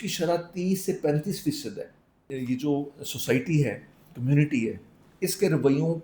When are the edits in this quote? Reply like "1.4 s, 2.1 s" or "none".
2.3 s